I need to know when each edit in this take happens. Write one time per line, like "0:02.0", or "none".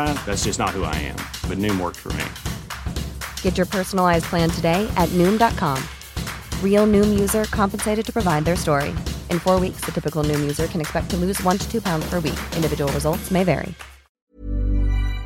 0:14.3